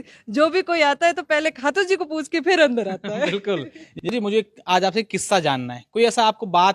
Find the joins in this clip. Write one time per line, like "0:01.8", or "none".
0:03.9